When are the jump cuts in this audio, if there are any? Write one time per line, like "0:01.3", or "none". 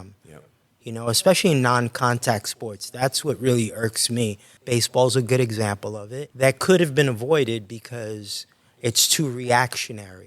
0:04.5
0:06.2